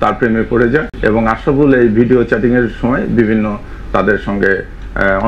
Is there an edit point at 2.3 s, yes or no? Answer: no